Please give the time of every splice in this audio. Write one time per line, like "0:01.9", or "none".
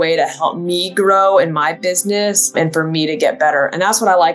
0:02.5